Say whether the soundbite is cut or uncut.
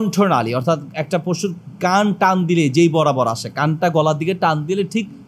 uncut